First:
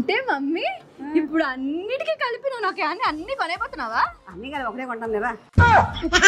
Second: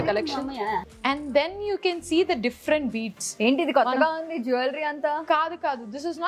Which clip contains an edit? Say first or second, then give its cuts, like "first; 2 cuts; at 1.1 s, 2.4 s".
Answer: second; 1 cut; at 0.9 s